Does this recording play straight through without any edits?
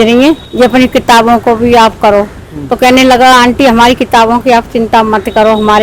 yes; 0 cuts

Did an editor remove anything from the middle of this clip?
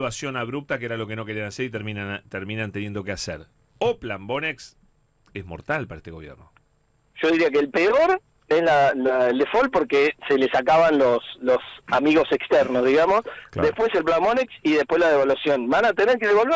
no; 0 cuts

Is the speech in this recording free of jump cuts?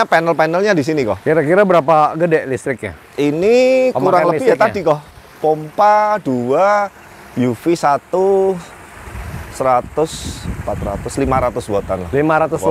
yes; 0 cuts

